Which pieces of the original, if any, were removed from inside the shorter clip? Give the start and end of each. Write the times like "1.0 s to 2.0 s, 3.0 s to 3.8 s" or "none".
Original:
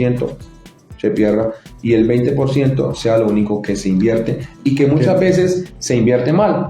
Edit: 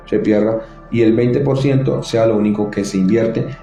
none

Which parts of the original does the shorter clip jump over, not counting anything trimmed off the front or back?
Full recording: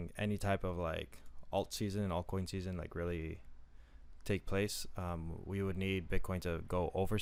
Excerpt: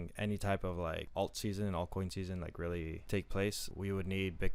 1.0 s to 1.4 s, 3.4 s to 4.2 s, 4.8 s to 5.4 s

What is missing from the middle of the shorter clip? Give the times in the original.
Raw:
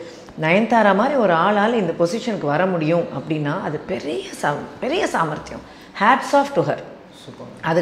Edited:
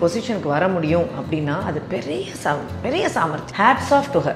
5.4 s to 5.9 s

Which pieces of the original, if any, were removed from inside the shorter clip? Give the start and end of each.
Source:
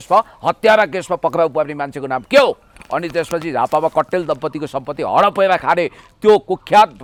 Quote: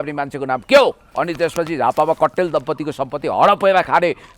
2.7 s to 2.8 s

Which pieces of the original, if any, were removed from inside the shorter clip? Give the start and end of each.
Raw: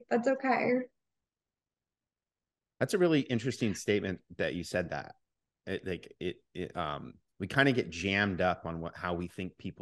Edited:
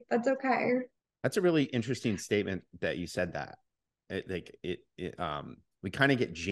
1.0 s to 2.6 s

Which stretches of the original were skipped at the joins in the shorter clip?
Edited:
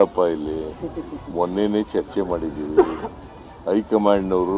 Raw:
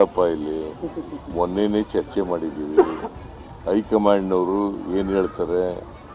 none

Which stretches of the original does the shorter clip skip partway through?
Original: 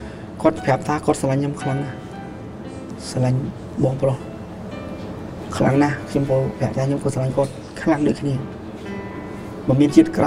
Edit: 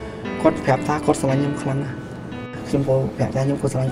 2.6 s to 6.0 s

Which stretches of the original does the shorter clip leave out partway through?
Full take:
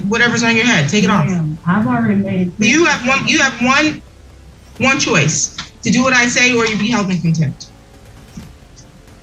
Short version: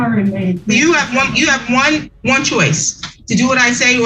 4.0 s to 4.7 s

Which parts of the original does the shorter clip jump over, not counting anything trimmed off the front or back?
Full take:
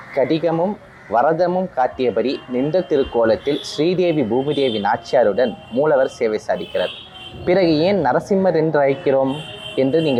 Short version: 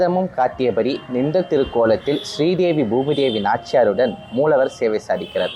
none

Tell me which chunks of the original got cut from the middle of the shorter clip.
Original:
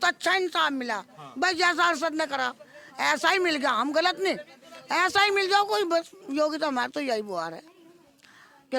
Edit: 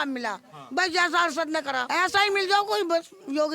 2.5 s to 4.8 s

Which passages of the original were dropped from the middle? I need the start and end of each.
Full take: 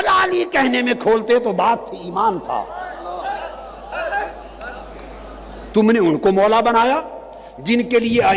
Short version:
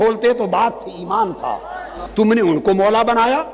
3.0 s to 5.5 s

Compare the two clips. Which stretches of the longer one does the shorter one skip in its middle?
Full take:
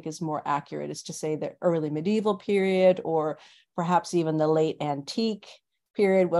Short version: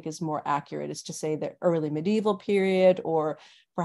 none

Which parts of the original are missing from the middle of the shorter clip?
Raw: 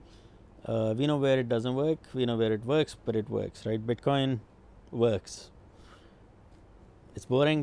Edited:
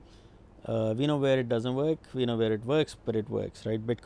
none

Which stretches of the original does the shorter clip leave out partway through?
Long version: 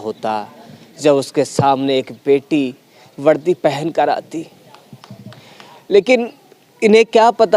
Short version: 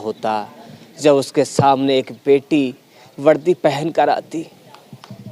none

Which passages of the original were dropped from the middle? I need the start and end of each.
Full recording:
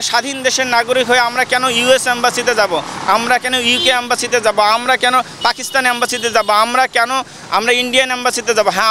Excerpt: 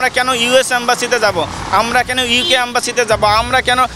none

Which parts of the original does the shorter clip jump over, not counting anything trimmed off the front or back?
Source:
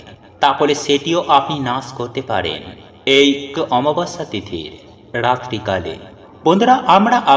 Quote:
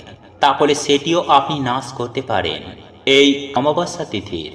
3.6 s to 3.8 s

